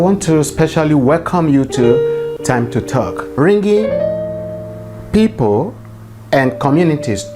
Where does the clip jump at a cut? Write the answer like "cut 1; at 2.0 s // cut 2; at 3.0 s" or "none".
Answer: cut 1; at 3.3 s